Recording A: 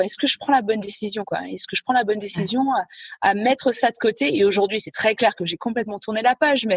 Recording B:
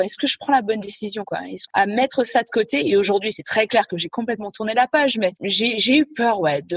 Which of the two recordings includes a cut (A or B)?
B